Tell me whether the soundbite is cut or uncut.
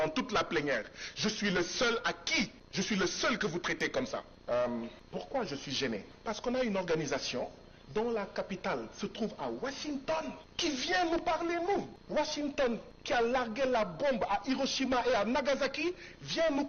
cut